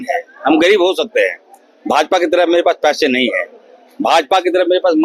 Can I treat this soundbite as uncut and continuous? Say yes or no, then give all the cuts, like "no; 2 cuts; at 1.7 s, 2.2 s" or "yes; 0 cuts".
yes; 0 cuts